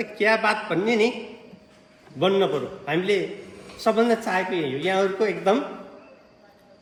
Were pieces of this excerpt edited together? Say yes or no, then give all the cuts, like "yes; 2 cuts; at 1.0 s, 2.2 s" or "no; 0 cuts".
no; 0 cuts